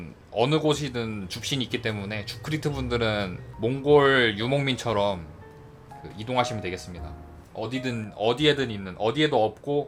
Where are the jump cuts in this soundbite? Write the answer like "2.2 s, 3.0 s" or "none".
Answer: none